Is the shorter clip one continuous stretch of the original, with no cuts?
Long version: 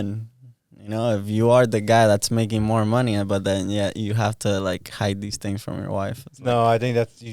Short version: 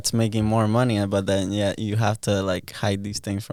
yes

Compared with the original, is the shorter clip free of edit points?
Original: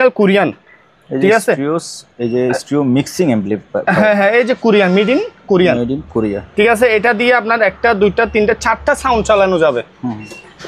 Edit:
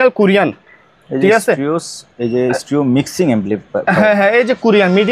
yes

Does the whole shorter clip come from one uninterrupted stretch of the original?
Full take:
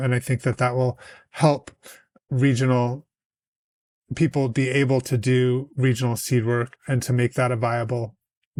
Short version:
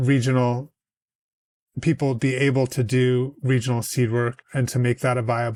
yes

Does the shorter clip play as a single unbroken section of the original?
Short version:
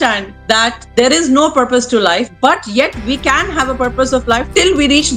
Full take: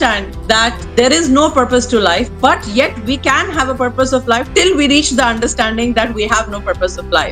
yes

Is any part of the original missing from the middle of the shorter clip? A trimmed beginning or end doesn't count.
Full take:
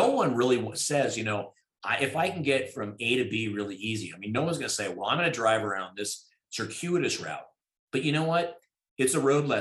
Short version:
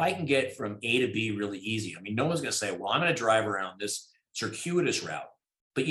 no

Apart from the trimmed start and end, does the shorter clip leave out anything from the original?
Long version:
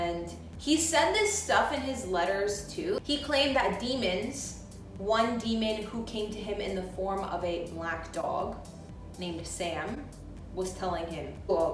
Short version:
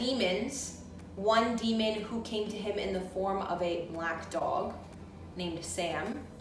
no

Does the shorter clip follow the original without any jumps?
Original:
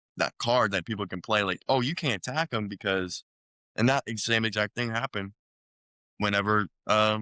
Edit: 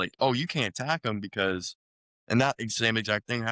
yes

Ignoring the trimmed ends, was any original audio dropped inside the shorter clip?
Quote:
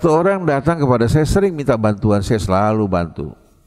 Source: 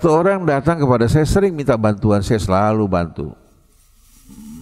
no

